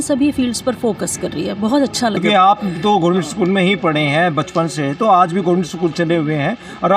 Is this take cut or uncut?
cut